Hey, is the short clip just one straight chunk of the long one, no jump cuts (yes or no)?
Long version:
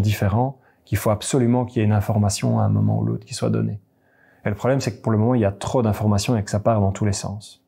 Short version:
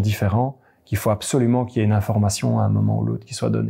yes